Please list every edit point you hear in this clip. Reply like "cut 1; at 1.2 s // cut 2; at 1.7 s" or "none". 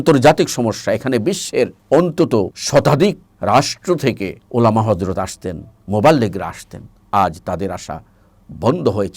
cut 1; at 1.8 s // cut 2; at 2.6 s // cut 3; at 3.3 s // cut 4; at 4.4 s